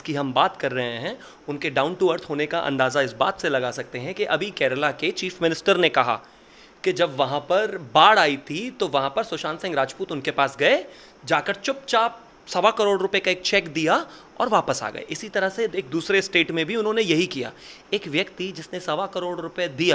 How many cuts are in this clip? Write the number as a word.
zero